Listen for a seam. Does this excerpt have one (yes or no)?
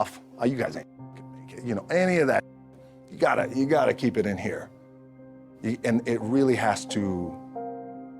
yes